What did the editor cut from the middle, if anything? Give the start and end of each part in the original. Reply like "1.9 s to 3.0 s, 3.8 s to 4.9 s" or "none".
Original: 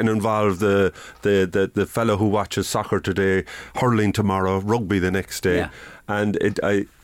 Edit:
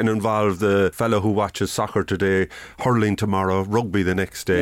1.0 s to 1.9 s